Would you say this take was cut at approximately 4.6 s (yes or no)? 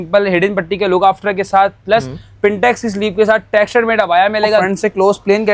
yes